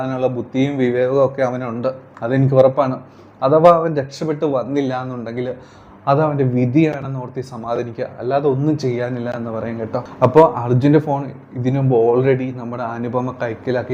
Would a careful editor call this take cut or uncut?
cut